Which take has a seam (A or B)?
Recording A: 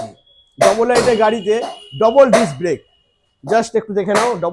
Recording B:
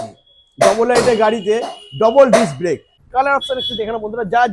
B